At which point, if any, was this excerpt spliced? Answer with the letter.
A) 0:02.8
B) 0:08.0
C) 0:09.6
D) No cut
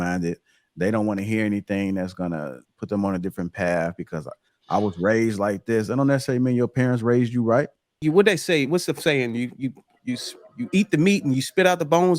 B